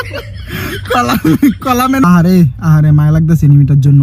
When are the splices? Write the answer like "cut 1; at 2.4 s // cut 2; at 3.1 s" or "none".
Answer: cut 1; at 2.0 s